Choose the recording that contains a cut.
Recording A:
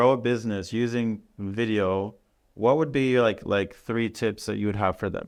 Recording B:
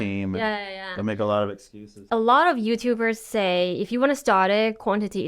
B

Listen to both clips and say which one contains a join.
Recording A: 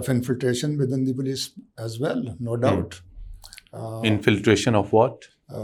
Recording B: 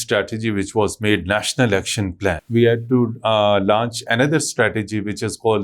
B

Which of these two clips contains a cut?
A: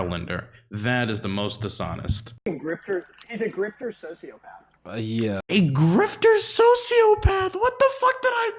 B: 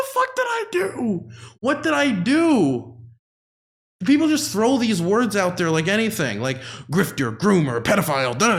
A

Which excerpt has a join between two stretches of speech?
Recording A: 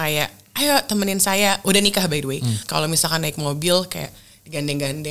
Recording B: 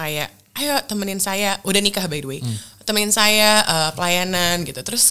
A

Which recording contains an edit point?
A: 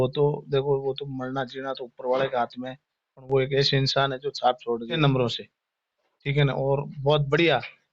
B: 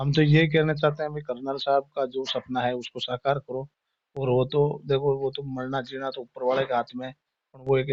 A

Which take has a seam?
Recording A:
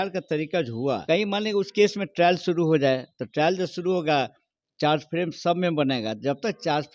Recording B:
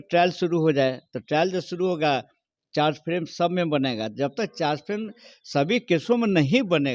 A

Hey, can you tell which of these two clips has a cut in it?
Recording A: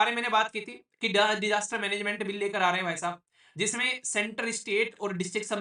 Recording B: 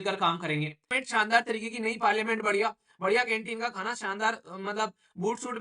B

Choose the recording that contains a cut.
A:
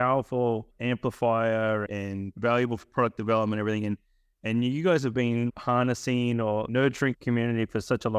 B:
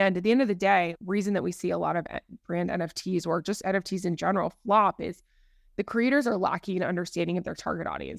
A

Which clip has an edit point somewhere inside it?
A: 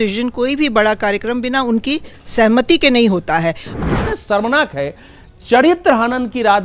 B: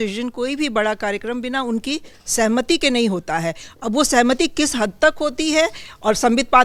A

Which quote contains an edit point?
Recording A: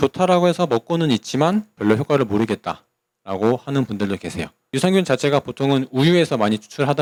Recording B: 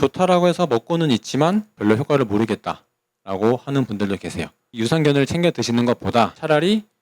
B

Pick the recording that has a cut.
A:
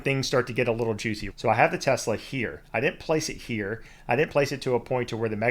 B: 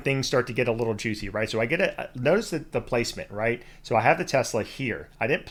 A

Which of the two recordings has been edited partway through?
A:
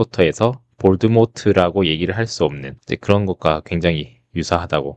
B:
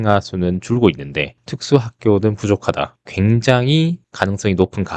B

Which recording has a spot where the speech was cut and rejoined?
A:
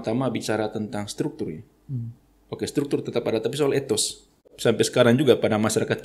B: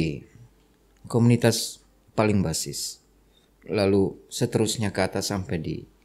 A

